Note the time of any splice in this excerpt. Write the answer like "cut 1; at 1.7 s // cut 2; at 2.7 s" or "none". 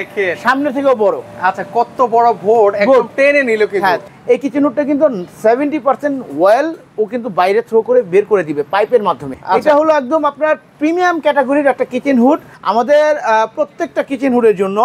cut 1; at 4.0 s // cut 2; at 9.3 s // cut 3; at 12.5 s